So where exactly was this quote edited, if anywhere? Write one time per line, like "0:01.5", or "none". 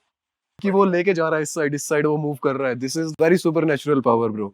0:00.7
0:03.0